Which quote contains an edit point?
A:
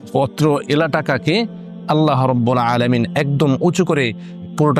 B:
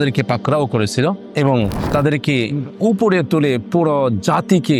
B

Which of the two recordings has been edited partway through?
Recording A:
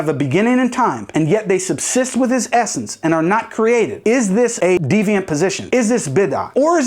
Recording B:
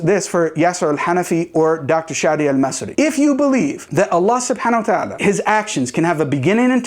A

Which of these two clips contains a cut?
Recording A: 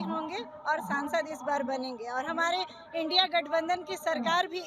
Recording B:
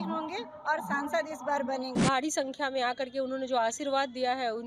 B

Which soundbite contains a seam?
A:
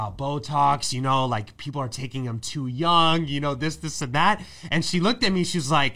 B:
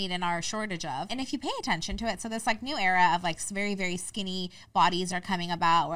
B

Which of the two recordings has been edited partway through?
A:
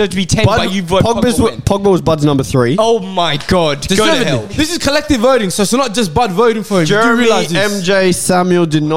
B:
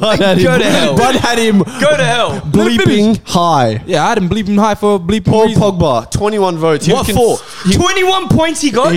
A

